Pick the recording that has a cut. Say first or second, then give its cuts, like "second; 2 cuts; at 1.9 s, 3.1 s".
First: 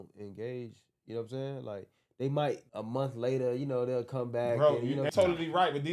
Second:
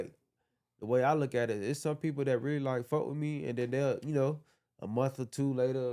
first; 2 cuts; at 2.7 s, 5.1 s